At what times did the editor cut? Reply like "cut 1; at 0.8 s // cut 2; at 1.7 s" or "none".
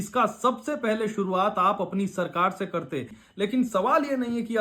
cut 1; at 3.2 s